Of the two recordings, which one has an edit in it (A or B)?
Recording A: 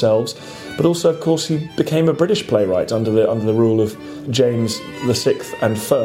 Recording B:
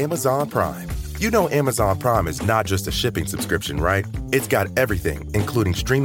A